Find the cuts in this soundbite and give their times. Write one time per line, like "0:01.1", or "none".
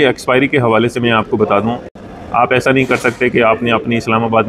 0:01.9